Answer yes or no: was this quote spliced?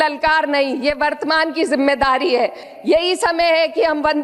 yes